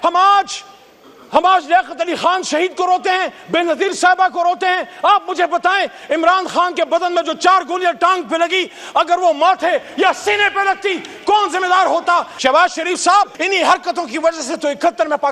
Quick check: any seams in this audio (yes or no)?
yes